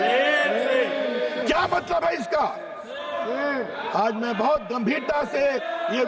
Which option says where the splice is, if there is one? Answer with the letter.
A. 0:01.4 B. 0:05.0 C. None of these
A